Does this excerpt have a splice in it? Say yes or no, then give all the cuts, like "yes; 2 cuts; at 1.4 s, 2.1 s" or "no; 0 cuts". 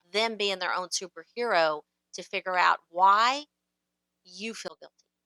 no; 0 cuts